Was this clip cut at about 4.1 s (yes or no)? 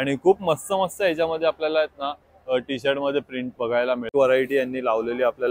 yes